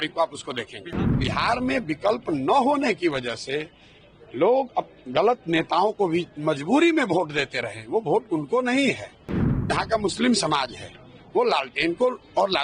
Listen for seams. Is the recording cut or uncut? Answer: cut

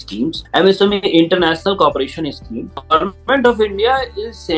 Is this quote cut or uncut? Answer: cut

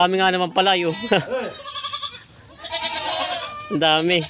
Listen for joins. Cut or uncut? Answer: uncut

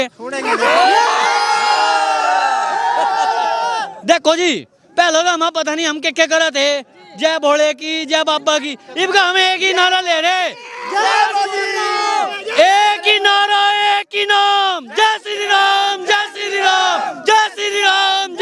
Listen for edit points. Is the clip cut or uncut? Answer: uncut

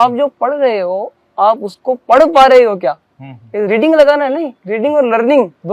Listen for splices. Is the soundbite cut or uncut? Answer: uncut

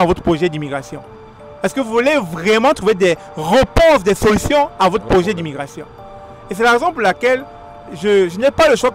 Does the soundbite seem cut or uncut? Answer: uncut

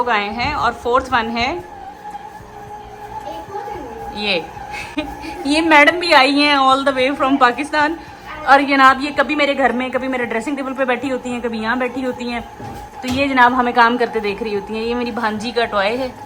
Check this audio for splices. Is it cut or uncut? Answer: uncut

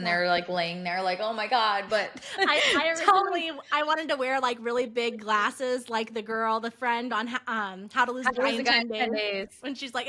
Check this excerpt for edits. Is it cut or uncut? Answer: uncut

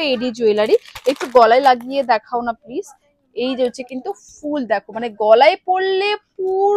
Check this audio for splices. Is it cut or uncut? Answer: uncut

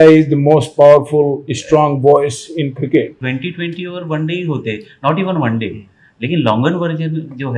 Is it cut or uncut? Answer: cut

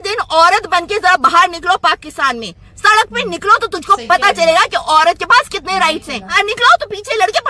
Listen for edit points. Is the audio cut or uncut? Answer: cut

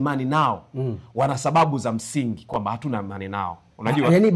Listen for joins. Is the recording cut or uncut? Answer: uncut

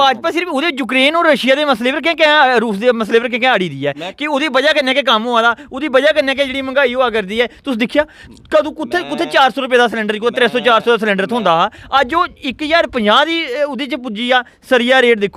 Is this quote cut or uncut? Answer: uncut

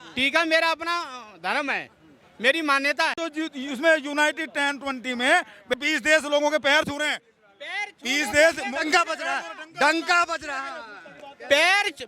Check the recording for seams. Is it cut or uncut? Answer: cut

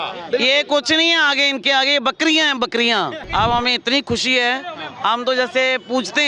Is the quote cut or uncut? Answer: cut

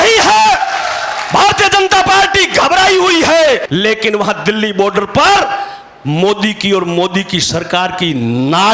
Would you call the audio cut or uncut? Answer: cut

